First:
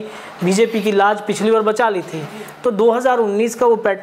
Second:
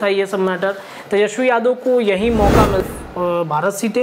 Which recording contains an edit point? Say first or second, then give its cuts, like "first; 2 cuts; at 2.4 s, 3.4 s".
second; 1 cut; at 2.8 s